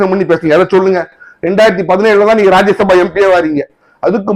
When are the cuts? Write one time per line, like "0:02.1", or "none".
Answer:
none